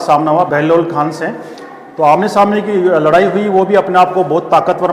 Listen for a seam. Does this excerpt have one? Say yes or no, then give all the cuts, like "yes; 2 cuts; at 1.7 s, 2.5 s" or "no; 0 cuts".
no; 0 cuts